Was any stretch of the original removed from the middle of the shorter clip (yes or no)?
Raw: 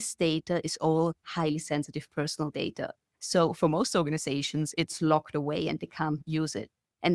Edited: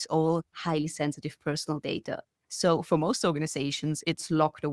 no